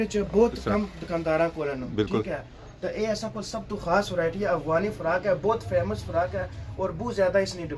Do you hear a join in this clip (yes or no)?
no